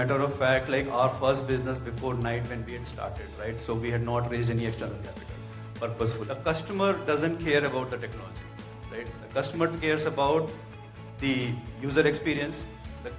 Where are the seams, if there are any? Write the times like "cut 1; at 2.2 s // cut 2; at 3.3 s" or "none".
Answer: cut 1; at 6.2 s